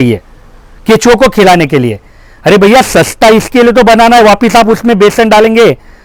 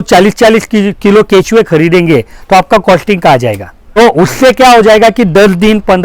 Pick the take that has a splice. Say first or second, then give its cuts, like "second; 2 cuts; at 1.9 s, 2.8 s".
second; 1 cut; at 3.7 s